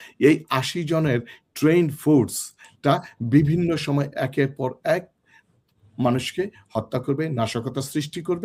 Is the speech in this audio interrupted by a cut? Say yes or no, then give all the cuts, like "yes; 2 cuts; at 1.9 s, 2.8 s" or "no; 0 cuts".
no; 0 cuts